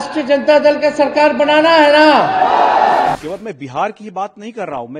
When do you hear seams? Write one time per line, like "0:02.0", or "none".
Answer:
0:03.1